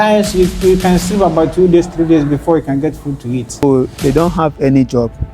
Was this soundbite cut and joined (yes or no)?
yes